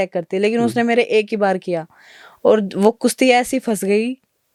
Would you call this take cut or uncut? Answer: uncut